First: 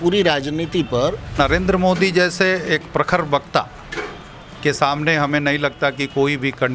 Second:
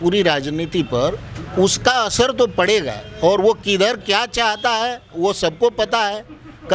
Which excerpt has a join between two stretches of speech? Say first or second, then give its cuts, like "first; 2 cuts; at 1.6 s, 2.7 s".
first; 1 cut; at 1.3 s